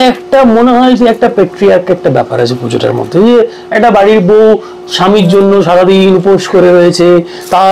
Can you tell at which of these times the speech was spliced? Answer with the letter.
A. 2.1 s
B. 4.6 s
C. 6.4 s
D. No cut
D